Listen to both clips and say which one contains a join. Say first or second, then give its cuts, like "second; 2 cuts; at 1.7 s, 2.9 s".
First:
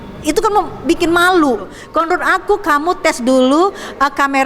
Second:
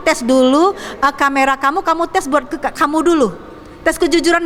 first; 1 cut; at 1.8 s